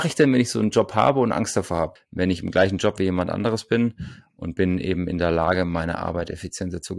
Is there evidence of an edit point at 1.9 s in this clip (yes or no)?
yes